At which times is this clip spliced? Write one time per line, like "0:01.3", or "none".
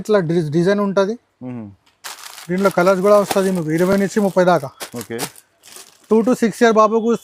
none